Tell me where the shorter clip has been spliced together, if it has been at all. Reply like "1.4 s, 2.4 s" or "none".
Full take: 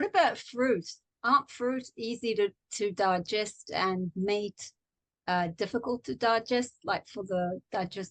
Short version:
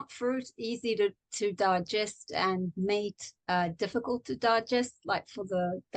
3.3 s